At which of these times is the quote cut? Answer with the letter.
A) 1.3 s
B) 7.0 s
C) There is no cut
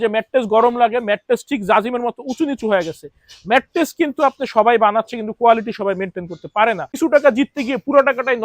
B